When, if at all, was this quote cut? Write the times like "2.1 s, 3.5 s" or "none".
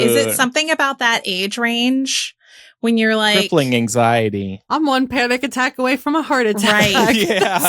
4.7 s